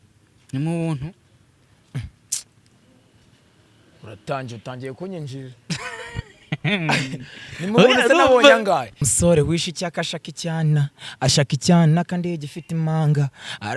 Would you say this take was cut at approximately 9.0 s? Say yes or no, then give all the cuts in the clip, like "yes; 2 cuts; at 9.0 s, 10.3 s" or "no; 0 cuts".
yes; 1 cut; at 9.0 s